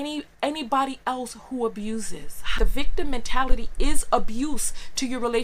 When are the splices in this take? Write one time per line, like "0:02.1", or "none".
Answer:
0:02.5